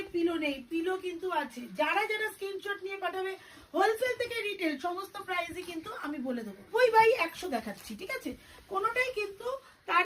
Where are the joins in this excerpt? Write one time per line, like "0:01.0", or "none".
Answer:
0:06.7